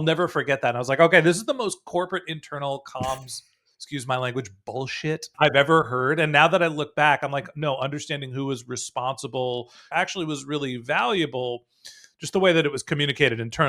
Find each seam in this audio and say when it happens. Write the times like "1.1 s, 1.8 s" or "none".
5.3 s, 9.9 s